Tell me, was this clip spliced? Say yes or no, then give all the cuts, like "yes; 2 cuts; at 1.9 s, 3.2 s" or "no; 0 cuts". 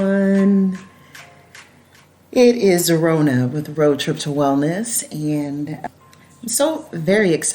yes; 1 cut; at 5.8 s